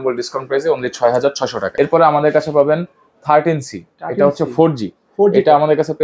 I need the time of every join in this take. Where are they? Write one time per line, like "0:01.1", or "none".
0:01.4